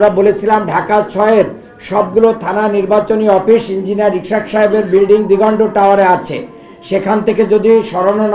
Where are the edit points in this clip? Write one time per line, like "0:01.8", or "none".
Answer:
none